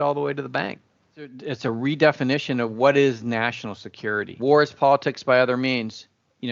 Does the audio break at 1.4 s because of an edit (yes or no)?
yes